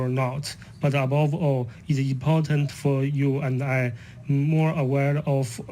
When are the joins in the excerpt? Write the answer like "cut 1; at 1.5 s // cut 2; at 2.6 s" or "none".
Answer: cut 1; at 4.8 s